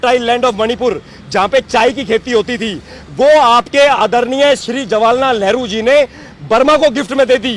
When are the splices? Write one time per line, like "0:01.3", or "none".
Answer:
none